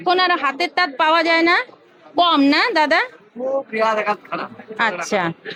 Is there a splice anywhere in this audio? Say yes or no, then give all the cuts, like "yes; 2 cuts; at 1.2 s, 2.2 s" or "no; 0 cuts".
no; 0 cuts